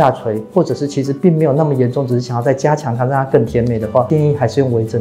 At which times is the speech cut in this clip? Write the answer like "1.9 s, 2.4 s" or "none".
4.1 s